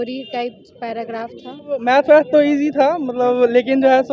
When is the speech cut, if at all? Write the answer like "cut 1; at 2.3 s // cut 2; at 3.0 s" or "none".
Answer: cut 1; at 1.8 s